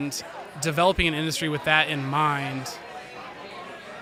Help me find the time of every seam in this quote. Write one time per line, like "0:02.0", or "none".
none